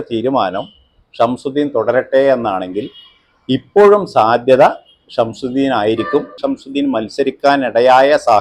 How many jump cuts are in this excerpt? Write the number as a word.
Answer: one